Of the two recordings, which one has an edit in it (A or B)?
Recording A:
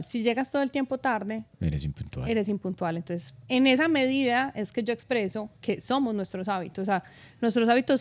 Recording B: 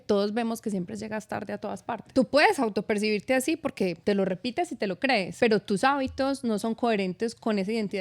B